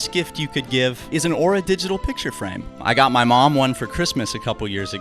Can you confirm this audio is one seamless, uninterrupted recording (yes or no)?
no